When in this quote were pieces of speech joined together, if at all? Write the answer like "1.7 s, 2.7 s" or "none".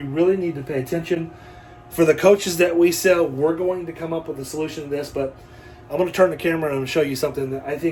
none